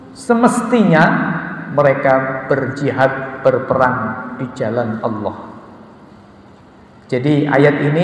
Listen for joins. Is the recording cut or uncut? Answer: uncut